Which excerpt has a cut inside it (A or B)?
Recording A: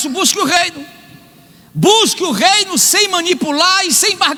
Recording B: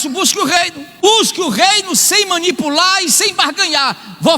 B